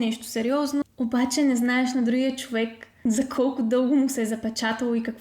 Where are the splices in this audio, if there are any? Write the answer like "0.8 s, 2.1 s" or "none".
0.8 s, 2.9 s